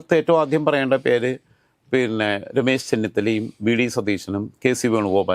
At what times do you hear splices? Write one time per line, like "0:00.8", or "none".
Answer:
none